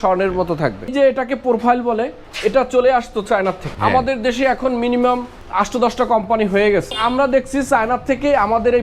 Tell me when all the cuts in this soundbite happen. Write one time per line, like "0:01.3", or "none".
0:00.9
0:02.2
0:03.7
0:05.4
0:07.0